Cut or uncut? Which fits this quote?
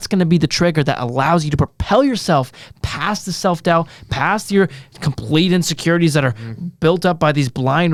uncut